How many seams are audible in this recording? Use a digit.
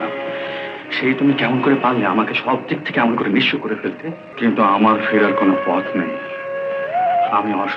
1